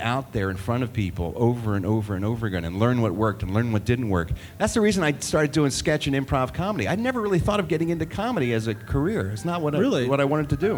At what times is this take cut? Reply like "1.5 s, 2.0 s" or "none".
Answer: none